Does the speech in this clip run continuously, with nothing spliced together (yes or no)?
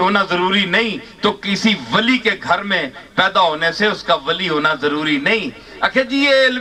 yes